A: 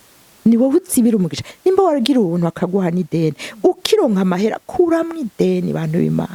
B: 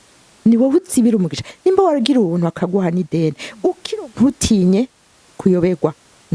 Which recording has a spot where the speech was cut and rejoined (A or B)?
B